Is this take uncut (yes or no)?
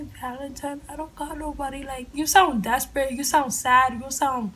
yes